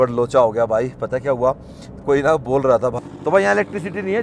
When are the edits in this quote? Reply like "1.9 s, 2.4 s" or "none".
2.9 s